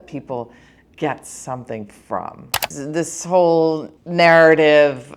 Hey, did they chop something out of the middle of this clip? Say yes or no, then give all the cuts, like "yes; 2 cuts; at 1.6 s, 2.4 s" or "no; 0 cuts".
yes; 2 cuts; at 2.5 s, 3.9 s